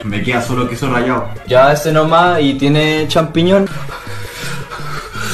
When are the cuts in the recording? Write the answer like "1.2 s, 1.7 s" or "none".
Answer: 1.3 s